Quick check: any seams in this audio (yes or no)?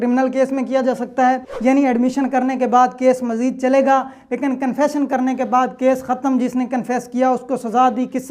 yes